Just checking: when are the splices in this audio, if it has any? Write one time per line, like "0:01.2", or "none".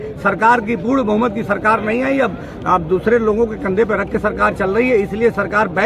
none